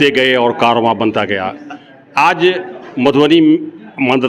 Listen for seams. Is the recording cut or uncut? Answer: uncut